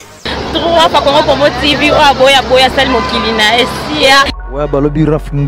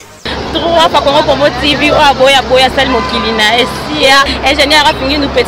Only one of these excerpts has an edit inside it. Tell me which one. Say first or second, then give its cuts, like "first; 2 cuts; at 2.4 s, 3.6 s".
first; 1 cut; at 4.3 s